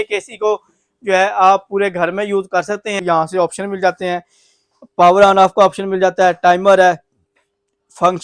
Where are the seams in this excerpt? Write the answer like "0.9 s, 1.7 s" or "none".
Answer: 3.0 s